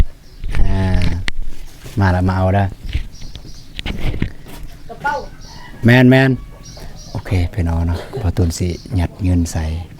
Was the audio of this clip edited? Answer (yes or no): no